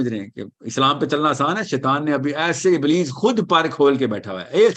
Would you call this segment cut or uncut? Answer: uncut